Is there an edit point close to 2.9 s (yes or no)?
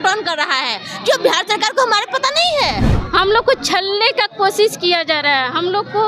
yes